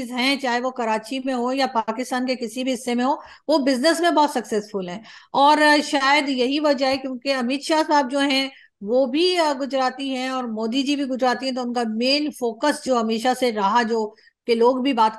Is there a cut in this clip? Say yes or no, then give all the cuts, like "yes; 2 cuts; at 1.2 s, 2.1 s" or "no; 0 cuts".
no; 0 cuts